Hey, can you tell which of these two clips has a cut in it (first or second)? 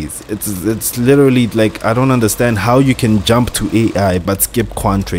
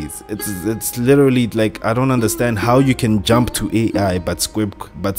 first